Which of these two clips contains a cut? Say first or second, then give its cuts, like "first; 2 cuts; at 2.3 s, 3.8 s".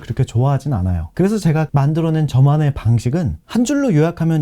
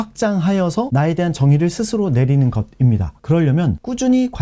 first; 1 cut; at 3.3 s